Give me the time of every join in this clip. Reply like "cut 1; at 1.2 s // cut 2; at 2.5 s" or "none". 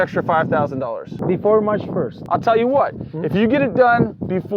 cut 1; at 1.1 s // cut 2; at 2.2 s